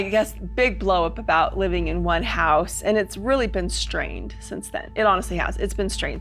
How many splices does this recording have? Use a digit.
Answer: 0